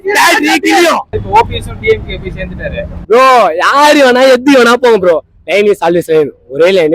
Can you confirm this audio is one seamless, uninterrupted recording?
no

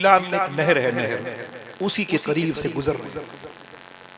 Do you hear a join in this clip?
no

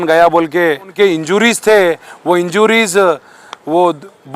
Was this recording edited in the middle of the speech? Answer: yes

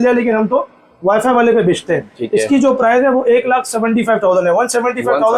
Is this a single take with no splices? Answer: yes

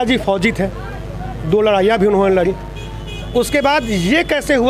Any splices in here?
no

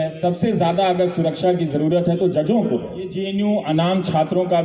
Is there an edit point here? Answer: yes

